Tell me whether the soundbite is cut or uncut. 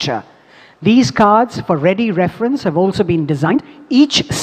cut